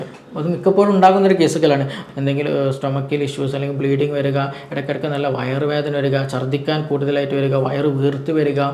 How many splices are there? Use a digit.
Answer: 1